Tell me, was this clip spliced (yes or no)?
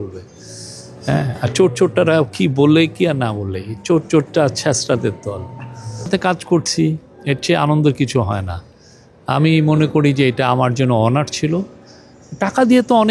yes